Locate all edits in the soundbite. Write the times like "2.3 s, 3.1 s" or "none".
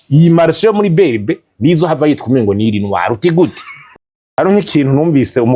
3.9 s